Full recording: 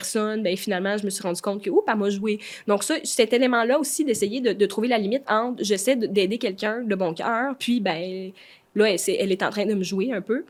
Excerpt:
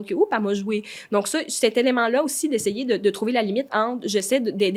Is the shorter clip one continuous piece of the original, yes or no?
yes